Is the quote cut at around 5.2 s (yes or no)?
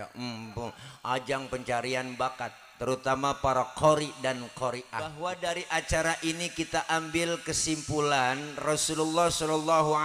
yes